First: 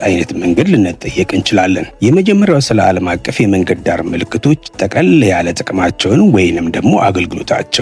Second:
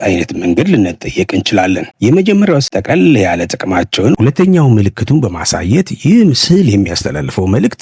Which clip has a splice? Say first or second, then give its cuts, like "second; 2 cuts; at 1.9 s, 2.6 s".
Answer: second; 2 cuts; at 2.6 s, 4.1 s